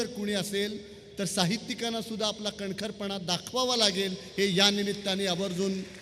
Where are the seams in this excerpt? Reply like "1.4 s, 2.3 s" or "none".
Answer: none